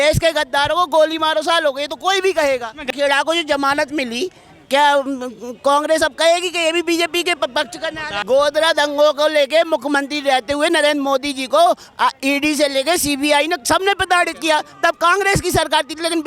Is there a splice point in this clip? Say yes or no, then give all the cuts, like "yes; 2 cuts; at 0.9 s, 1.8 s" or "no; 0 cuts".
yes; 2 cuts; at 2.8 s, 8.1 s